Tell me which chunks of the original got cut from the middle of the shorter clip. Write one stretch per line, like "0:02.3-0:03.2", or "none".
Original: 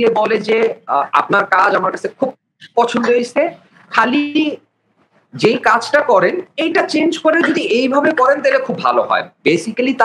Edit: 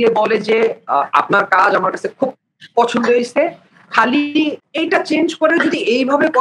0:04.7-0:06.5